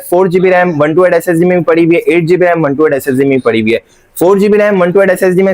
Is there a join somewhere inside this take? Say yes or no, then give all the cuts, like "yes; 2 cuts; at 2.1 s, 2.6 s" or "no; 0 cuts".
no; 0 cuts